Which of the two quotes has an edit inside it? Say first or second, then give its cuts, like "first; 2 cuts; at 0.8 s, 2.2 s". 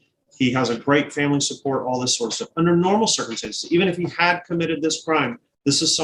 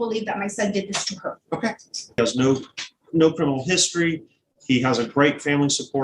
second; 1 cut; at 2.2 s